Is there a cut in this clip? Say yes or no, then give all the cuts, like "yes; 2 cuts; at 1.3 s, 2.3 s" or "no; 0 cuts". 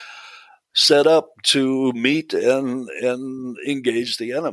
no; 0 cuts